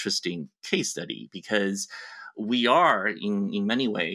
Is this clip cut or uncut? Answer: uncut